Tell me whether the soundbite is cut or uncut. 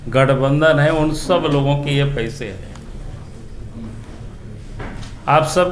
uncut